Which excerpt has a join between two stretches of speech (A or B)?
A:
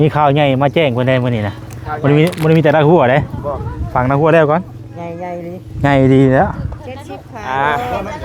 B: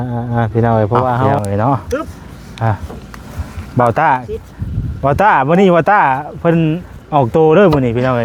B